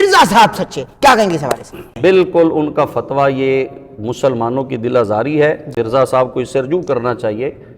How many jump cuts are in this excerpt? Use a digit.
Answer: 2